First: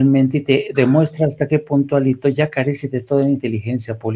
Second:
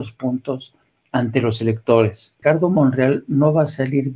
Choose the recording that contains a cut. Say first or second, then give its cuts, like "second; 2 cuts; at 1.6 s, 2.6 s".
second; 1 cut; at 2.3 s